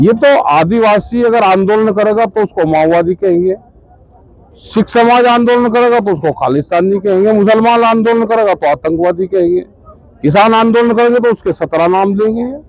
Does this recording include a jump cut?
no; 0 cuts

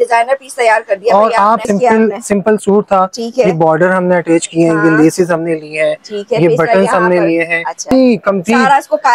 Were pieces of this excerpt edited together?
yes; 2 cuts; at 1.7 s, 7.9 s

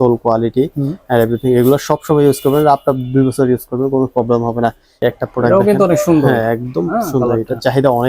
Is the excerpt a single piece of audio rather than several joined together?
no; 1 cut; at 4.9 s

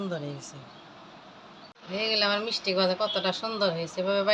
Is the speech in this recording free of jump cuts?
no; 1 cut; at 1.7 s

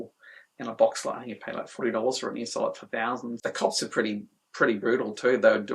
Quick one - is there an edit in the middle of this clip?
yes; 1 cut; at 3.3 s

